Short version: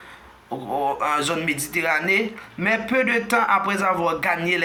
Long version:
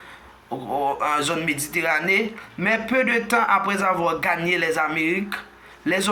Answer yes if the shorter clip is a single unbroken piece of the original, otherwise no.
yes